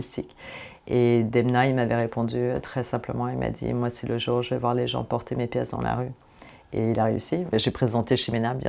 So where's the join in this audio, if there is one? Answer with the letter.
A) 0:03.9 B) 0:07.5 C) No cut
B